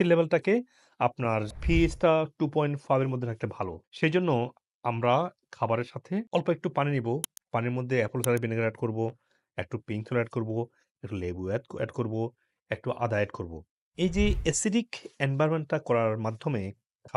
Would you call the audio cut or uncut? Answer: uncut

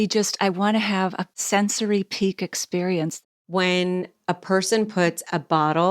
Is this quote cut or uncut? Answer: cut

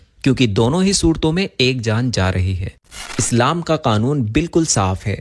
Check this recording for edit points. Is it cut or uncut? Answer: cut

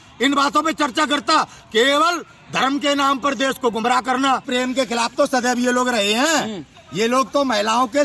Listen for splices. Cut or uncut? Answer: cut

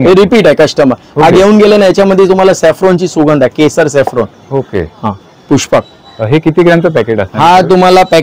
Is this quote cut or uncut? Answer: uncut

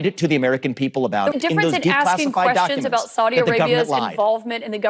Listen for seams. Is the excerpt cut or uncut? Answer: cut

